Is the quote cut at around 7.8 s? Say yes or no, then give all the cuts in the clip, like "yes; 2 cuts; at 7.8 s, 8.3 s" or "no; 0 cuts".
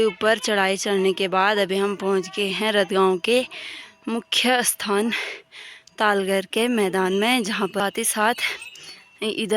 yes; 1 cut; at 7.8 s